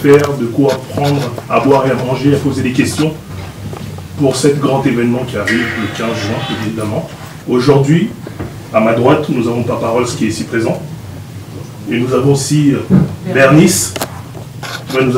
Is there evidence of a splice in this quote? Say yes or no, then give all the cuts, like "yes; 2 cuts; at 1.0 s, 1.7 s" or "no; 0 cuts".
yes; 1 cut; at 7.3 s